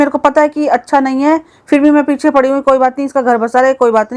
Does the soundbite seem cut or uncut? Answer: uncut